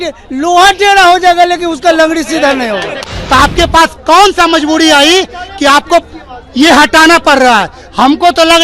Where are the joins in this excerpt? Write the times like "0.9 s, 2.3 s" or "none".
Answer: 3.1 s